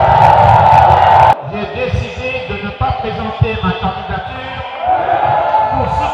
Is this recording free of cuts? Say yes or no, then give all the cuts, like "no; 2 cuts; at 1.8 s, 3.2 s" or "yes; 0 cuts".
no; 1 cut; at 1.3 s